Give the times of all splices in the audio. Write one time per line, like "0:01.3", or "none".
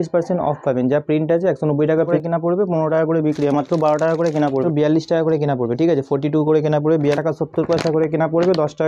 0:02.1
0:04.6
0:07.2